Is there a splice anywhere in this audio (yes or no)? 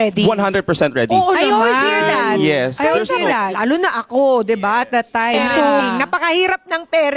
no